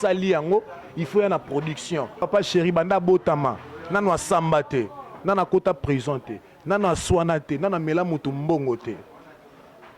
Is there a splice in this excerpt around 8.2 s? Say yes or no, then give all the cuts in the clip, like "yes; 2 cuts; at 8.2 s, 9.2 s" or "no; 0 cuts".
no; 1 cut; at 2.3 s